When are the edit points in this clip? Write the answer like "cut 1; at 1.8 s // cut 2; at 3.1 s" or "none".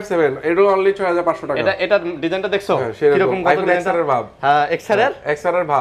none